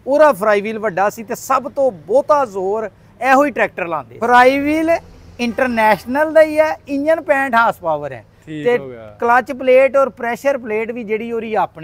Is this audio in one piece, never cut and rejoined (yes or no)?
no